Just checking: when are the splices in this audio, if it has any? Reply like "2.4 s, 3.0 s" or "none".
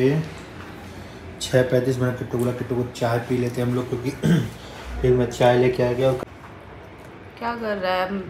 6.2 s